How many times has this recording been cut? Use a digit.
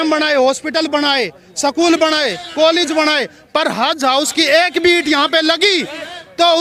0